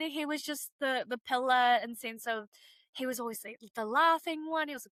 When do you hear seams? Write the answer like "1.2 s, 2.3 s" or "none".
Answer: none